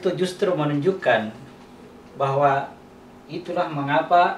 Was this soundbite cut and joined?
no; 0 cuts

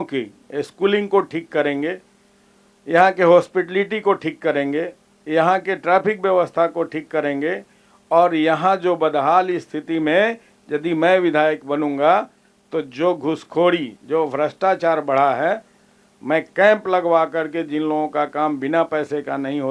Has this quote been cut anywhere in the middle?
no; 0 cuts

